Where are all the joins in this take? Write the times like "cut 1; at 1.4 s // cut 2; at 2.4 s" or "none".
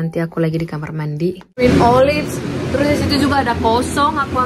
cut 1; at 1.6 s